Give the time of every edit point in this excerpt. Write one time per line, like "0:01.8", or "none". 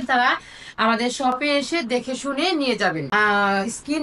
0:03.0